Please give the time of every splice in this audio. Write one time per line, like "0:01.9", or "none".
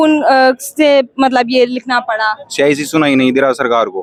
none

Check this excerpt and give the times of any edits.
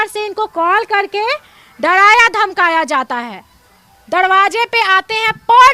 none

